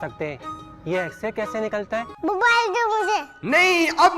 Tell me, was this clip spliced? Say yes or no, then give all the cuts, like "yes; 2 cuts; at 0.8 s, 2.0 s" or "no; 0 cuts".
yes; 1 cut; at 2.1 s